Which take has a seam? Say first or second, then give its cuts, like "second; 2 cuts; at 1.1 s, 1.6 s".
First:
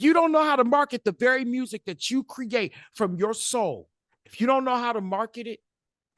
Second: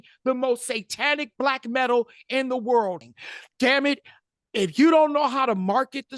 second; 1 cut; at 3.1 s